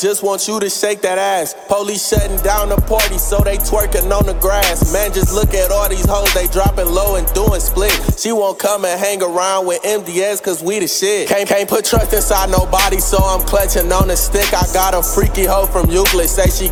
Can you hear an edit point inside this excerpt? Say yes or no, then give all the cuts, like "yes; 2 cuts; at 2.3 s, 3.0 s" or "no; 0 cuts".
no; 0 cuts